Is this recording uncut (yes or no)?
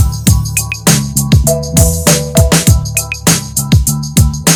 yes